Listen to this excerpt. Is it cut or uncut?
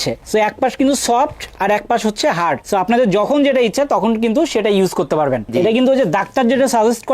cut